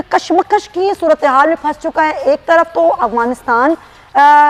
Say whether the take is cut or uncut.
uncut